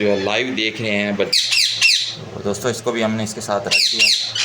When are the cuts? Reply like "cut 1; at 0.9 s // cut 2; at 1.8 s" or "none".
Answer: cut 1; at 1.3 s